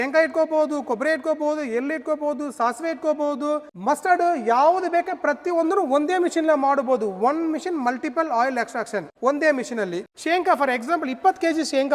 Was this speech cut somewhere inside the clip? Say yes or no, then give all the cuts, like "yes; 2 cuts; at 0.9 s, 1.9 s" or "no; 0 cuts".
yes; 2 cuts; at 3.7 s, 10.0 s